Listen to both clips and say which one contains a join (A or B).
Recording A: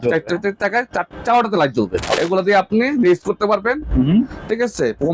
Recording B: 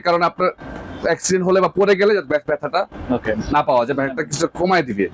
A